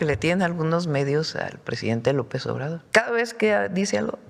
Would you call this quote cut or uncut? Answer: cut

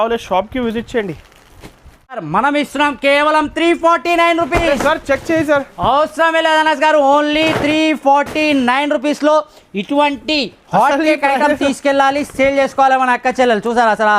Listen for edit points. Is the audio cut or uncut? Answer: cut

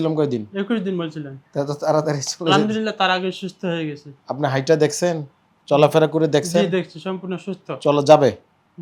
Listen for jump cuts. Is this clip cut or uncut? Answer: uncut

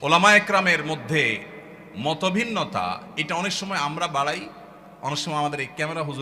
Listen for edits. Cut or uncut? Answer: uncut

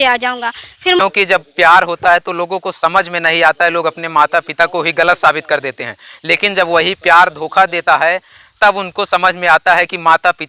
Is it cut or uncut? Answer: cut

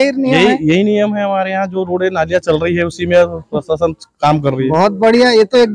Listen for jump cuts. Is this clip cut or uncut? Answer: uncut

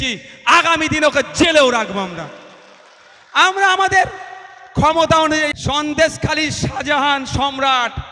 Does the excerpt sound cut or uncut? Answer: cut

